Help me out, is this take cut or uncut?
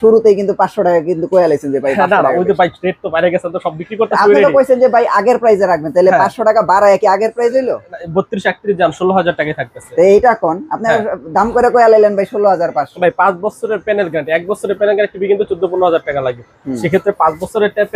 uncut